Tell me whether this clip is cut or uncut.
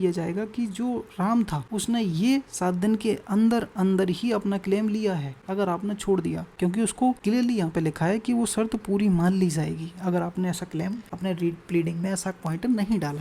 cut